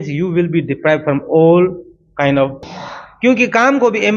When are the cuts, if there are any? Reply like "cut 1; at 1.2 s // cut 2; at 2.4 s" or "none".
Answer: cut 1; at 2.6 s